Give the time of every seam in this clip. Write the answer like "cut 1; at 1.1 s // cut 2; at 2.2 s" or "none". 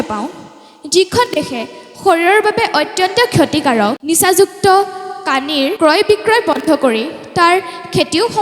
cut 1; at 4.0 s // cut 2; at 5.7 s